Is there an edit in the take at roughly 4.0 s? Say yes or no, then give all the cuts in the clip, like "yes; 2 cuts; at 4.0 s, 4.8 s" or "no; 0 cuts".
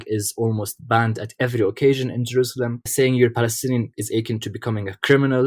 yes; 2 cuts; at 2.9 s, 4.0 s